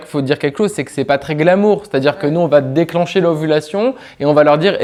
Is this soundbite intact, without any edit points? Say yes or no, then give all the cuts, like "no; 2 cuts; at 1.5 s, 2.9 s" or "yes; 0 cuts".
yes; 0 cuts